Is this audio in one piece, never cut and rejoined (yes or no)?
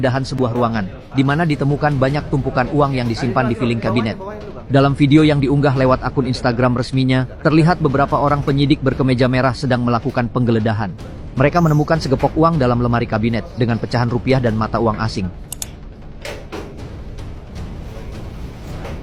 yes